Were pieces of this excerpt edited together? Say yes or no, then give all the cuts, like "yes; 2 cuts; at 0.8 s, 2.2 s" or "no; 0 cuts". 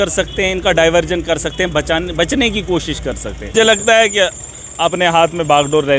yes; 1 cut; at 3.5 s